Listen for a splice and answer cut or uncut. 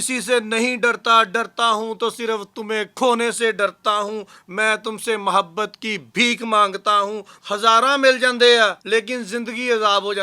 cut